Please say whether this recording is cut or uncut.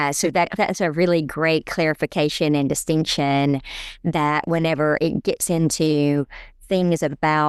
uncut